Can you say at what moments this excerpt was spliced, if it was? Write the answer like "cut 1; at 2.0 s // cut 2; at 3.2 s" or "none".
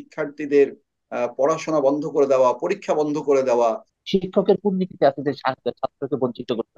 cut 1; at 3.9 s